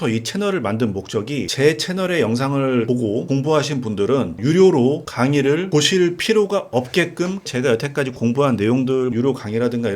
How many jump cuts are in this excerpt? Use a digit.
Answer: 5